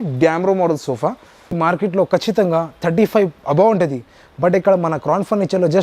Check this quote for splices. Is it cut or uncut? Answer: cut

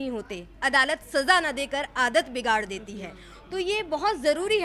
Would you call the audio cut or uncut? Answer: uncut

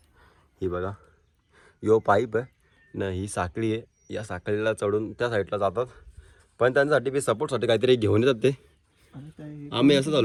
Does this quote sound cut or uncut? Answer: uncut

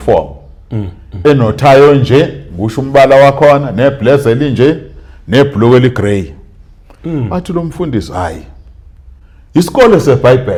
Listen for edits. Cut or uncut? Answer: uncut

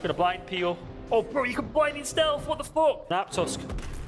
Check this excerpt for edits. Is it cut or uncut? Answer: cut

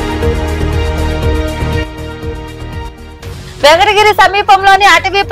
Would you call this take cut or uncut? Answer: uncut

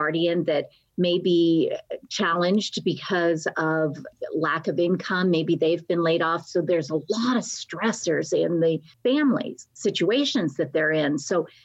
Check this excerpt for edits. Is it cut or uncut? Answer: cut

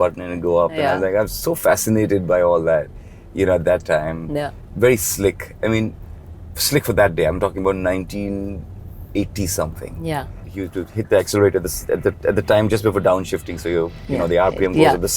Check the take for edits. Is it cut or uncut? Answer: cut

